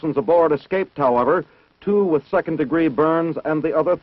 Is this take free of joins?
no; 1 cut; at 2.8 s

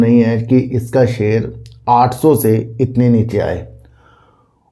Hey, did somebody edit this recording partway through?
no; 0 cuts

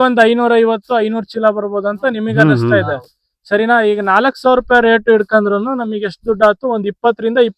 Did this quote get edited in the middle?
no; 0 cuts

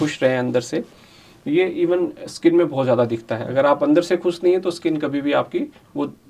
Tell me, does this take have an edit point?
no; 0 cuts

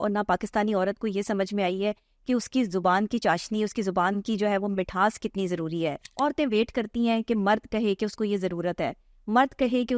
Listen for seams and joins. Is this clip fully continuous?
no; 1 cut; at 6.0 s

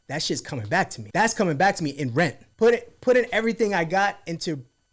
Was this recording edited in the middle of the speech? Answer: yes; 2 cuts; at 1.0 s, 2.4 s

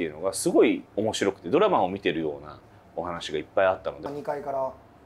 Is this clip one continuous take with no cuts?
no; 2 cuts; at 0.9 s, 4.1 s

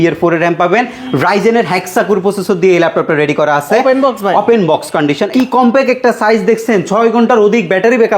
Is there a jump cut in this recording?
yes; 2 cuts; at 1.0 s, 5.2 s

